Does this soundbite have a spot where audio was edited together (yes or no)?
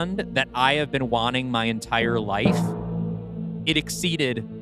no